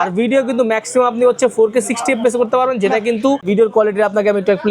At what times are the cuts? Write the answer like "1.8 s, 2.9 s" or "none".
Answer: 3.5 s